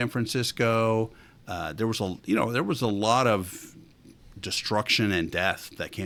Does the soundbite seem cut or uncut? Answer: uncut